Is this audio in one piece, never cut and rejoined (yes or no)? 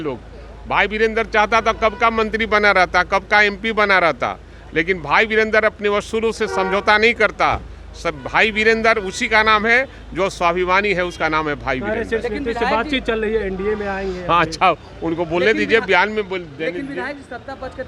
yes